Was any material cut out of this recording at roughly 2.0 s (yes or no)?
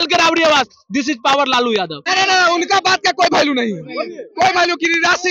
yes